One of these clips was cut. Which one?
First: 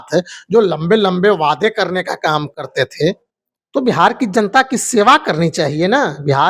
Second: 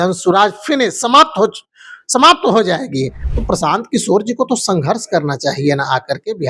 second; 1 cut; at 3.2 s

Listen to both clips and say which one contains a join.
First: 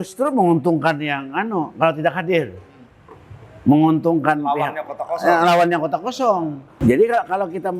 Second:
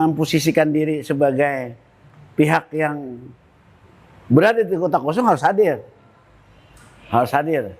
first; 1 cut; at 6.8 s

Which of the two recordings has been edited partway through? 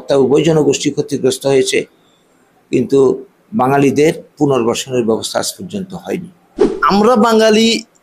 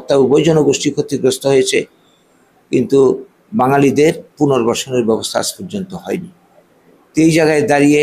first; 1 cut; at 6.8 s

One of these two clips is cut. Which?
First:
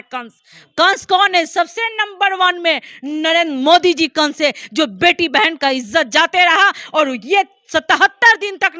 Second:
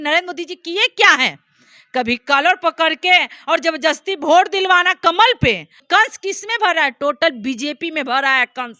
second; 1 cut; at 5.8 s

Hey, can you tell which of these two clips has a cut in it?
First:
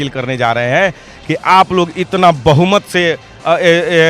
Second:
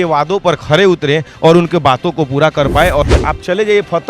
second; 1 cut; at 3.1 s

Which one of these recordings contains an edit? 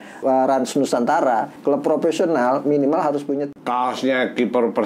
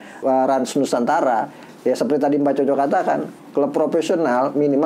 first; 2 cuts; at 1.5 s, 3.5 s

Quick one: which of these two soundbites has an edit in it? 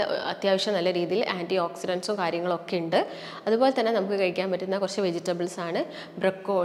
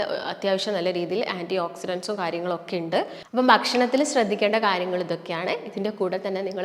second; 1 cut; at 3.2 s

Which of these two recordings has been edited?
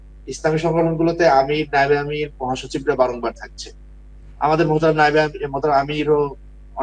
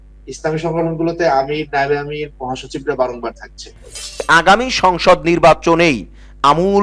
second; 1 cut; at 4.2 s

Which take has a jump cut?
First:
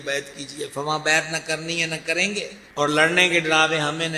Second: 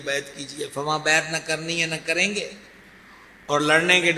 first; 1 cut; at 2.6 s

